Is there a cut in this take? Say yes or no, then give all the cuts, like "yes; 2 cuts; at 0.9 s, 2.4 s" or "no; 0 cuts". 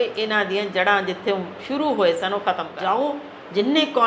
yes; 1 cut; at 2.7 s